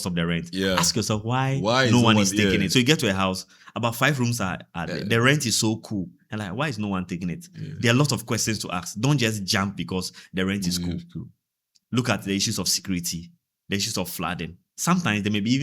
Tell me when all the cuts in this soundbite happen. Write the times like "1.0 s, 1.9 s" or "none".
none